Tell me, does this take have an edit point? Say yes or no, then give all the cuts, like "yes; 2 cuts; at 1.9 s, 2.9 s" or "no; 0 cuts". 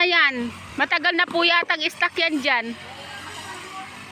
no; 0 cuts